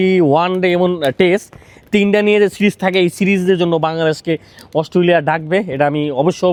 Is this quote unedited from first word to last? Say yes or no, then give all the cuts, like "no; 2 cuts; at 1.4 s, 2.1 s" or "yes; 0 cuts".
yes; 0 cuts